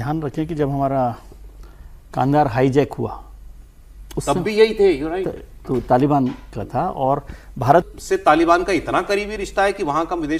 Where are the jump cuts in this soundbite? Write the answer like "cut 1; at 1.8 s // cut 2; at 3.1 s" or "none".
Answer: cut 1; at 7.9 s